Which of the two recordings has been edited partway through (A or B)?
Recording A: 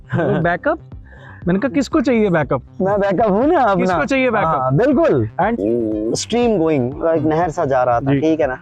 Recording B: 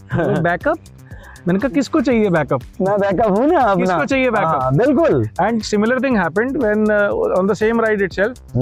A